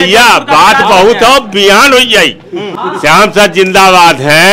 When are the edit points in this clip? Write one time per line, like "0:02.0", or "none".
none